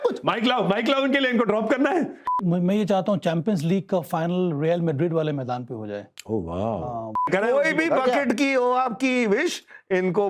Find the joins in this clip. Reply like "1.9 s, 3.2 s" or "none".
2.4 s, 7.3 s

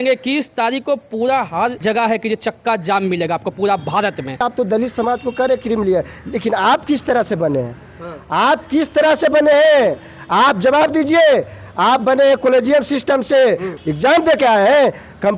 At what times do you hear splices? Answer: 1.8 s, 4.4 s, 13.7 s

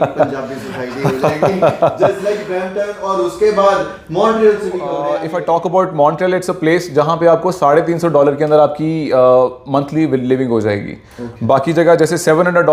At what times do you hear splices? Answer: 5.0 s

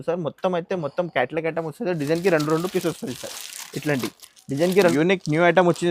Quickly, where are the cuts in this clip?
4.9 s

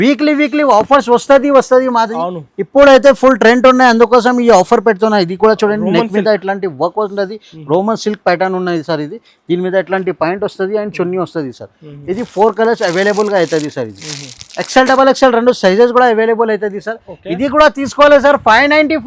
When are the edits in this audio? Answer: none

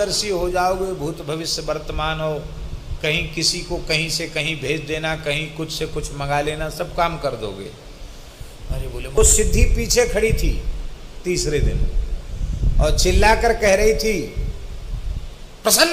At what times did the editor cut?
9.2 s

